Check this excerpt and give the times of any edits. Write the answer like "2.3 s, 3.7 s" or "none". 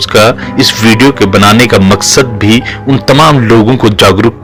none

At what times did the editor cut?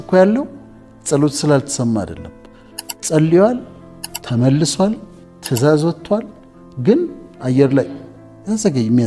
none

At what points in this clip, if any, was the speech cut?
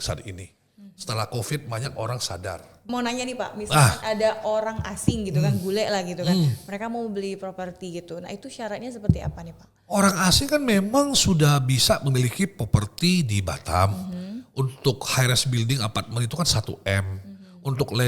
2.8 s

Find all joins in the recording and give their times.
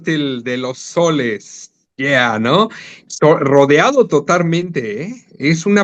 none

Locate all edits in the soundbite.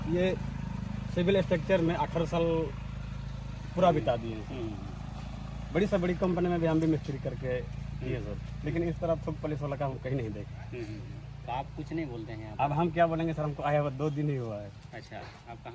none

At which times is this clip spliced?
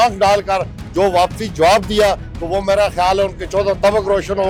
none

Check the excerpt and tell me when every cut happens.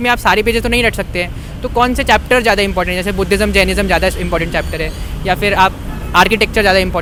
none

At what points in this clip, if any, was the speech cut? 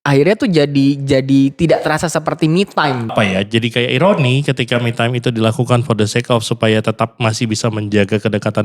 3.1 s

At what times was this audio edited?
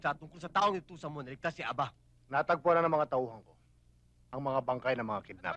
2.1 s

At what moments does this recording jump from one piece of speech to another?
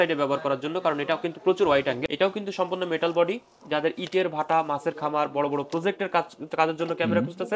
2.0 s

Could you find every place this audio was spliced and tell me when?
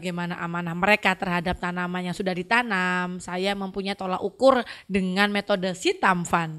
none

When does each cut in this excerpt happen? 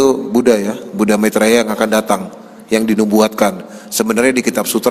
none

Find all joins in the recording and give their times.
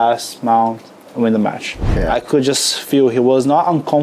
1.8 s

